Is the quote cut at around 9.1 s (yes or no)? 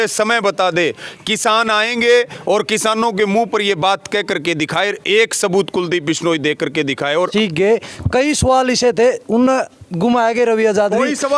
no